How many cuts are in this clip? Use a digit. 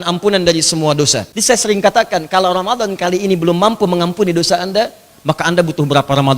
1